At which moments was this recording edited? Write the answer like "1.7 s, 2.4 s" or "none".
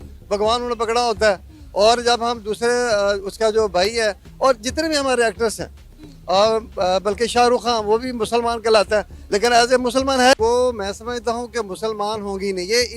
10.3 s